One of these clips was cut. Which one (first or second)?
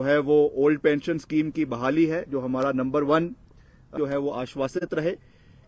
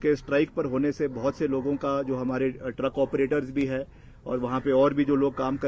first